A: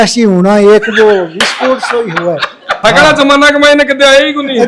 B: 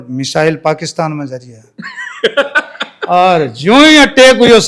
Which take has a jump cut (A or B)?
A